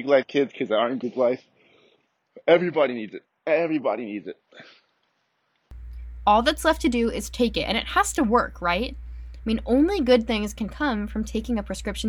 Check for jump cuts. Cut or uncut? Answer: uncut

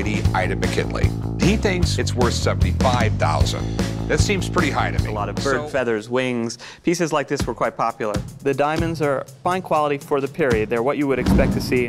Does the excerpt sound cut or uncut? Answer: cut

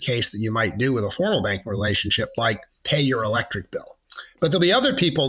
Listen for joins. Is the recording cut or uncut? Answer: cut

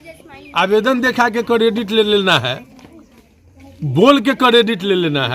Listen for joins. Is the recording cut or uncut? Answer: uncut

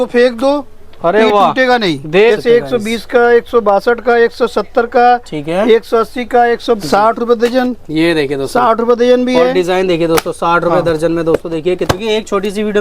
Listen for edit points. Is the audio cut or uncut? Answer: cut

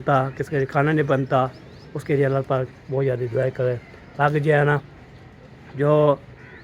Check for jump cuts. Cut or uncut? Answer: uncut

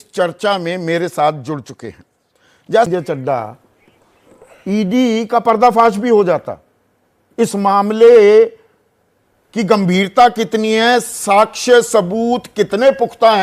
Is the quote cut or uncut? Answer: cut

